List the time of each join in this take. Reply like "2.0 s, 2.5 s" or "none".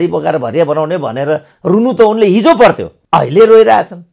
2.9 s

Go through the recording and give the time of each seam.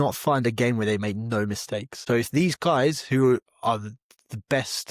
1.9 s

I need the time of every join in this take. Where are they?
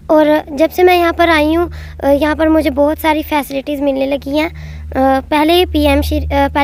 none

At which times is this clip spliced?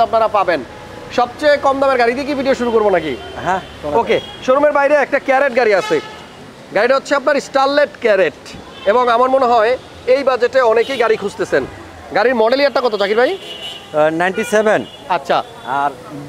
none

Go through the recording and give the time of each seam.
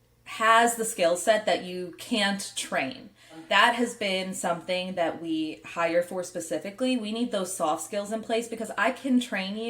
3.4 s

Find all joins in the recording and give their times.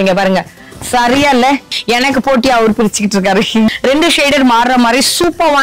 1.6 s, 3.7 s

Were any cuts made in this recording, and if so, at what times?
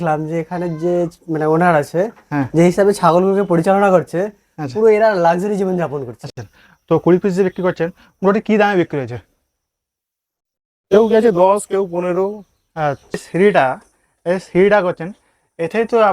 6.2 s, 13.3 s

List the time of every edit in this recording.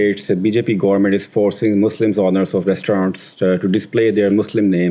none

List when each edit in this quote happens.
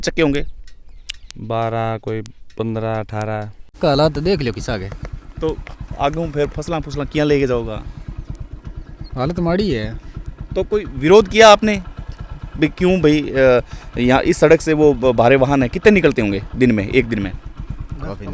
3.8 s

